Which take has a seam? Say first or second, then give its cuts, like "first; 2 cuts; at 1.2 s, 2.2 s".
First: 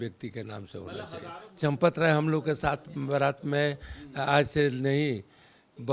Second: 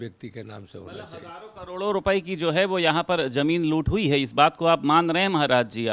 first; 1 cut; at 1.5 s